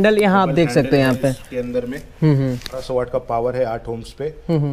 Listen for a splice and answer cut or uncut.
cut